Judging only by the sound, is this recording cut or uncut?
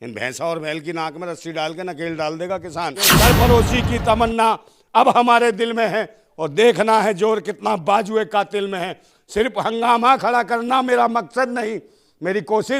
cut